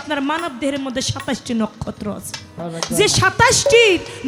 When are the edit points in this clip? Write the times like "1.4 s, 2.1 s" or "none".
2.6 s